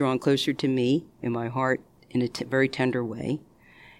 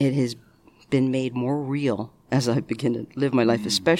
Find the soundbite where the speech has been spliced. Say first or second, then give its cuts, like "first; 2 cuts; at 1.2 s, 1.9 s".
first; 1 cut; at 1.9 s